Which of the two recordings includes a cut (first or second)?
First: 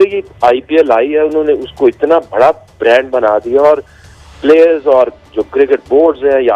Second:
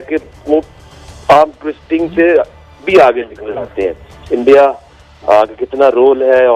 second